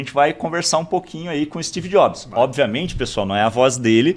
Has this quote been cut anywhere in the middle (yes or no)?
no